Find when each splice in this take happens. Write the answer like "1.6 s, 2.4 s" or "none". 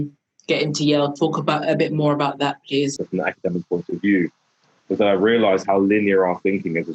3.0 s